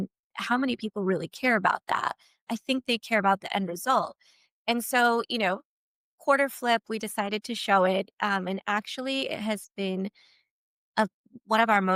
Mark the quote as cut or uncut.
uncut